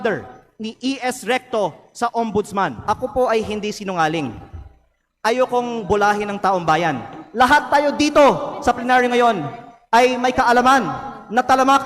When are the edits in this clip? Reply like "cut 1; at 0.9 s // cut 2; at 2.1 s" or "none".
cut 1; at 2.8 s